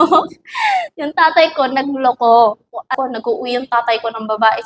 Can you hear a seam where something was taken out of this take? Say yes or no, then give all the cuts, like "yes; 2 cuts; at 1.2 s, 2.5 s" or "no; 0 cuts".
yes; 1 cut; at 2.9 s